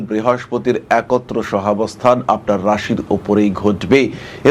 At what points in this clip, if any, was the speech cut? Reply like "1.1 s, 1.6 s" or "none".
none